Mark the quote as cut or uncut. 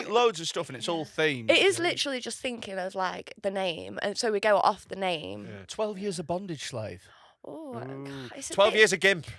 cut